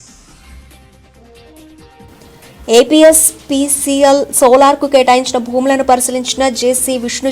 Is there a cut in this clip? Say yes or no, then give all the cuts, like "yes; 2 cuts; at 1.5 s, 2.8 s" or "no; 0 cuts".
no; 0 cuts